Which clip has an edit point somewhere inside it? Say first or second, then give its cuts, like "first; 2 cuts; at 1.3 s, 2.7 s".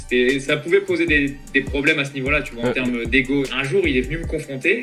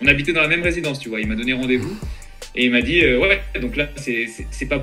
first; 1 cut; at 3.5 s